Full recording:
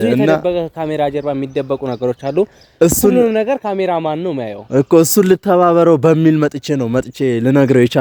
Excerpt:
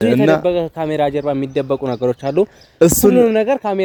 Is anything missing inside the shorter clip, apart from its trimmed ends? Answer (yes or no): no